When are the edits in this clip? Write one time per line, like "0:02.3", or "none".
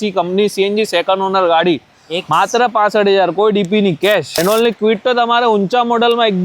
0:04.4

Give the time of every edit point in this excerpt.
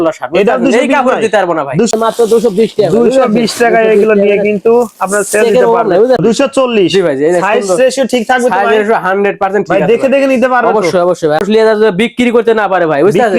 0:01.9
0:06.2
0:11.4

